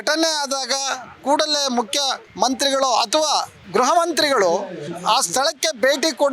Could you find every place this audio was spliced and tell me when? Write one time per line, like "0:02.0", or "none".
0:02.2
0:04.8

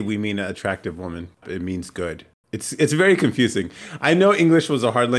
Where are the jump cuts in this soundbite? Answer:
0:01.4

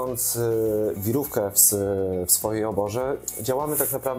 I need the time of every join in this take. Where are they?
none

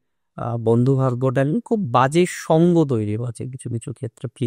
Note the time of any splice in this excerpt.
none

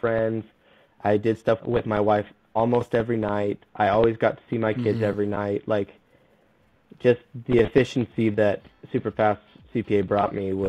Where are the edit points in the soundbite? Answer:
0:01.6

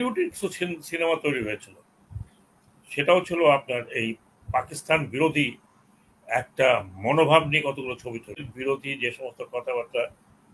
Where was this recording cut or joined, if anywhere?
0:08.5

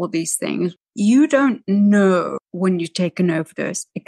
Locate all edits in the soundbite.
0:00.7
0:02.4

